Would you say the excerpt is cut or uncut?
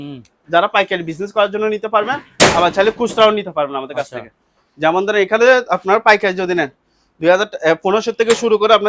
uncut